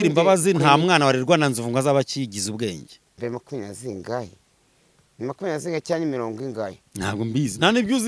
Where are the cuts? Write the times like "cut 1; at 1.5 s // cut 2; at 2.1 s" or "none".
cut 1; at 3.2 s